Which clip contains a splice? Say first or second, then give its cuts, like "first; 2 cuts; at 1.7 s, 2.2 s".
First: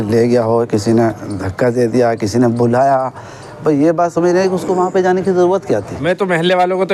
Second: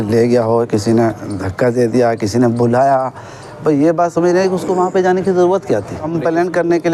first; 1 cut; at 5.9 s